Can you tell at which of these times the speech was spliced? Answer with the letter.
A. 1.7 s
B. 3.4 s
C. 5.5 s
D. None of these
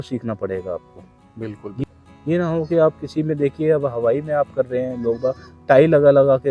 A